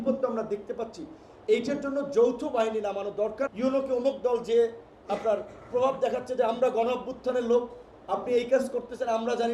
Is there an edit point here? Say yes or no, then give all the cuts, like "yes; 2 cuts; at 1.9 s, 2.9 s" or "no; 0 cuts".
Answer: yes; 1 cut; at 3.5 s